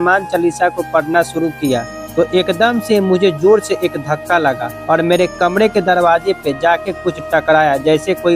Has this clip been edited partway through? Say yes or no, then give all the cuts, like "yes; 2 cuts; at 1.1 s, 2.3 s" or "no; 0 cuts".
yes; 2 cuts; at 2.0 s, 4.7 s